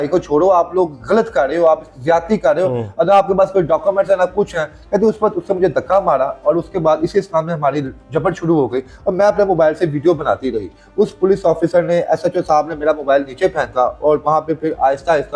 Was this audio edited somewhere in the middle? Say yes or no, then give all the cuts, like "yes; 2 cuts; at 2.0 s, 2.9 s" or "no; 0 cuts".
no; 0 cuts